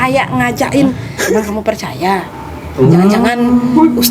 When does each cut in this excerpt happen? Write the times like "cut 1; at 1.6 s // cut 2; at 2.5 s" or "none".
cut 1; at 1.1 s